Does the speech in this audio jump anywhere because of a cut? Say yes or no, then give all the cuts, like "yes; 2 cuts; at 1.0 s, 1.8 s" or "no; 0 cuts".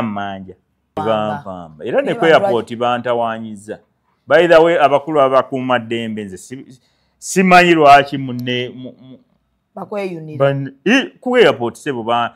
yes; 1 cut; at 1.0 s